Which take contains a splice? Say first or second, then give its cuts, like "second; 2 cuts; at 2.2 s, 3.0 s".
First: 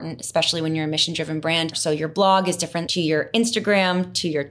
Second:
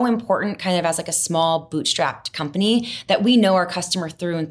first; 2 cuts; at 1.8 s, 2.8 s